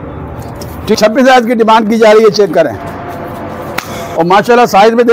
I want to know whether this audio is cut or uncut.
cut